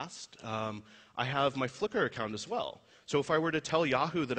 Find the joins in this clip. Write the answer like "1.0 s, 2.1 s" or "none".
2.4 s